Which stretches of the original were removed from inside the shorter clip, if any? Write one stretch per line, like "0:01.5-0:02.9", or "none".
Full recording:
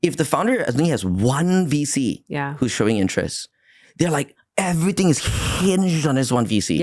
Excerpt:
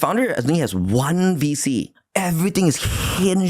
0:02.3-0:04.4